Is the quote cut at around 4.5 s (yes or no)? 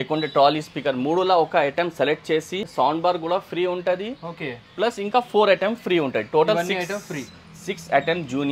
no